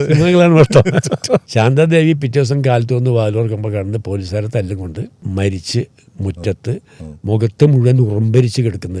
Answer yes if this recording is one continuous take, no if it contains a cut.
no